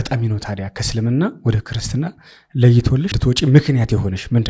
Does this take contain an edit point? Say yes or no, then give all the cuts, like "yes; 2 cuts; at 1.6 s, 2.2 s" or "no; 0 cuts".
yes; 1 cut; at 3.2 s